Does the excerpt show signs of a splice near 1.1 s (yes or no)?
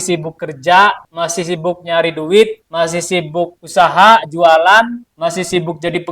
yes